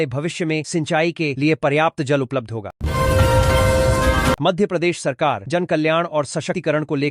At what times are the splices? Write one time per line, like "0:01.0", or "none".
0:02.7
0:04.4